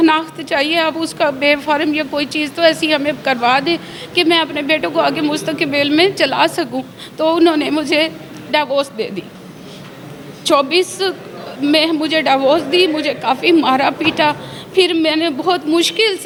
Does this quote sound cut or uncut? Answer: uncut